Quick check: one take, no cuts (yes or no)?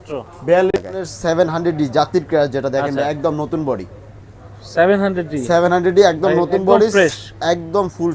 no